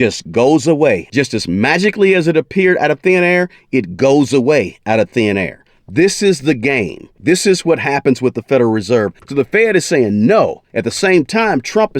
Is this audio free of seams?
no; 3 cuts; at 1.1 s, 7.2 s, 9.2 s

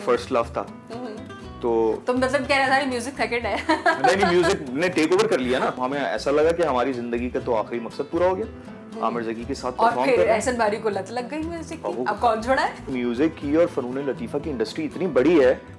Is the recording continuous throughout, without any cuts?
no; 2 cuts; at 5.8 s, 12.9 s

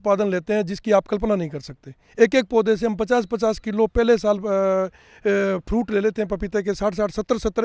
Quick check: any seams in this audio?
no; 0 cuts

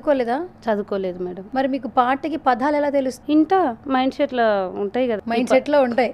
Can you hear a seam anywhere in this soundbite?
yes; 3 cuts; at 1.4 s, 3.1 s, 5.2 s

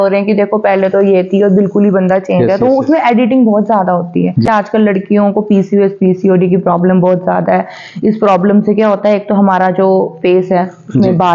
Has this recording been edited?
yes; 1 cut; at 4.5 s

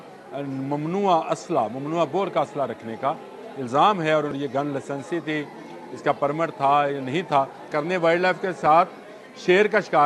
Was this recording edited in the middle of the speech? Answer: yes; 2 cuts; at 4.4 s, 7.6 s

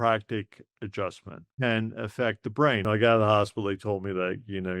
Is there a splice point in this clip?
yes; 2 cuts; at 1.5 s, 2.8 s

